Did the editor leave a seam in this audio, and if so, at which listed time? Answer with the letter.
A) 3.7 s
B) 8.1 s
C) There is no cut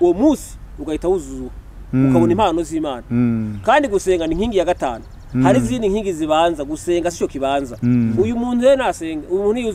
B